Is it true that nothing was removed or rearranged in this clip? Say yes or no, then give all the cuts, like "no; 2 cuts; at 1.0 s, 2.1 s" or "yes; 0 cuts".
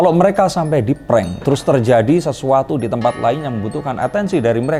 yes; 0 cuts